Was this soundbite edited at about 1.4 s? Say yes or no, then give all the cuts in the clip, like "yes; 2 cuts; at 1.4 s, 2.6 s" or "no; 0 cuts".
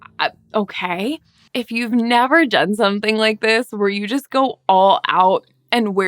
yes; 1 cut; at 1.4 s